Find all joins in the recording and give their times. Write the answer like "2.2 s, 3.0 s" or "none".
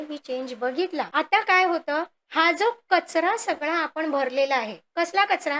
1.1 s